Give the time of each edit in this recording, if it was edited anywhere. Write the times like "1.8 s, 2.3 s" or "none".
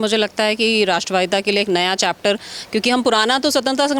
none